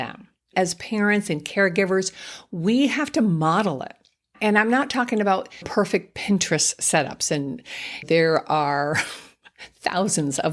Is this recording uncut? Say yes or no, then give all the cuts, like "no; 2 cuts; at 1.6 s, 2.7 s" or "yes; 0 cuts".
no; 3 cuts; at 4.3 s, 5.7 s, 8.0 s